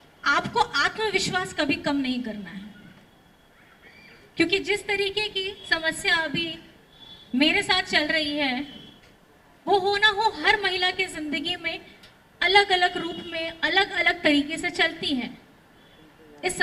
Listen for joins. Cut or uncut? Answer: uncut